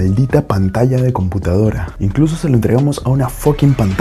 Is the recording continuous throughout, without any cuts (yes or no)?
yes